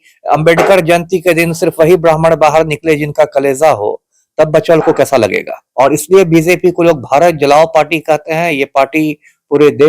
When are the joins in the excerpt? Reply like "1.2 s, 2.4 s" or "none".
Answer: 5.6 s